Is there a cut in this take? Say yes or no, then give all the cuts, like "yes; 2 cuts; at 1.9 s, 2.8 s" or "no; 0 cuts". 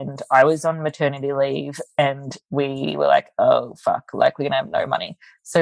no; 0 cuts